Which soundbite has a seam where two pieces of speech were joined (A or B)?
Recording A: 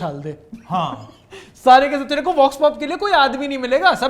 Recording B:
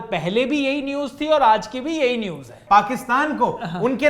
B